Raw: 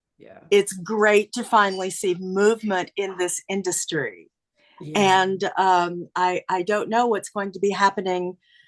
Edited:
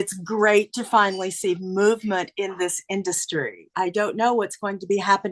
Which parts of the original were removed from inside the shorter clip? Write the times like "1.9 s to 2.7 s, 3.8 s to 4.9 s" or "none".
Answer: 4.3 s to 6.4 s